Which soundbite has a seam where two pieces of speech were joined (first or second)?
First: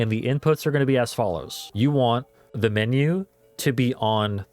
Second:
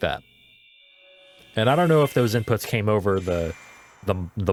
first